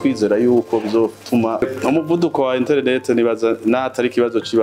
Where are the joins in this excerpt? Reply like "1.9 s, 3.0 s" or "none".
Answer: 1.6 s